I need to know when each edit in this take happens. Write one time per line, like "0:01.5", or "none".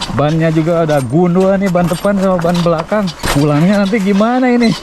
0:03.2